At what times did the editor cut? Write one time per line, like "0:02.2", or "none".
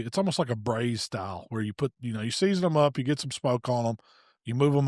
none